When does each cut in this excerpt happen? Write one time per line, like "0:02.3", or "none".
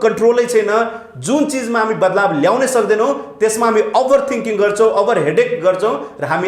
none

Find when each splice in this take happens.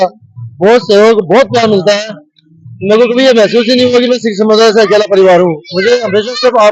none

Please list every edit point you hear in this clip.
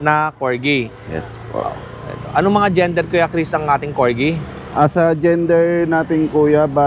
none

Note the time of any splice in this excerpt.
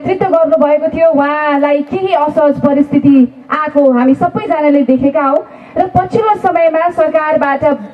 none

